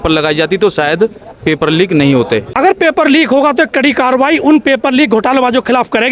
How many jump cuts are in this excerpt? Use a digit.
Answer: 1